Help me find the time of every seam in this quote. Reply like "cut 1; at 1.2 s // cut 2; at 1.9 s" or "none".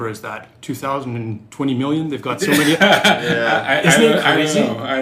none